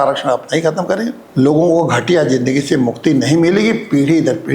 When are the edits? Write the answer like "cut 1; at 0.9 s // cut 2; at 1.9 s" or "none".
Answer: cut 1; at 1.2 s